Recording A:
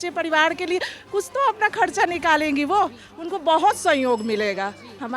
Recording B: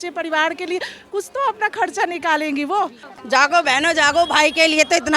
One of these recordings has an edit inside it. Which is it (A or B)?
B